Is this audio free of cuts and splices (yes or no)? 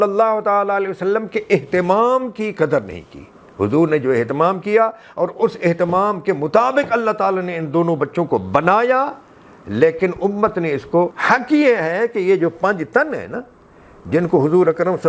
no